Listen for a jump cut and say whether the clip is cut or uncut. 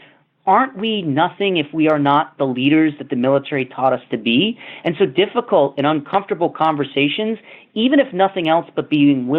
uncut